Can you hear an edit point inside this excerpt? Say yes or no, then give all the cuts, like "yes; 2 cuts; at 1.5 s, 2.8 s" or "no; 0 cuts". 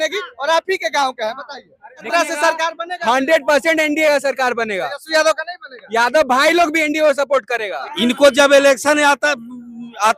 yes; 2 cuts; at 2.1 s, 7.7 s